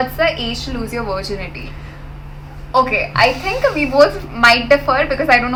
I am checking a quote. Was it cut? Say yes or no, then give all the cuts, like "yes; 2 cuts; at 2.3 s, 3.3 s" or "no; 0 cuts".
no; 0 cuts